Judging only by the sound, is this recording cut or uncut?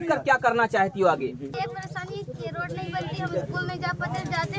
cut